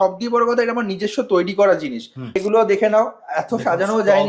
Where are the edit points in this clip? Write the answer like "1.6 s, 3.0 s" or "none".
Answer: 2.4 s